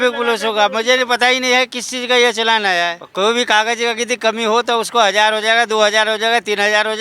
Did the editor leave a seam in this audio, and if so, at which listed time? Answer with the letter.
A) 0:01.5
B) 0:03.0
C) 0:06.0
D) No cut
B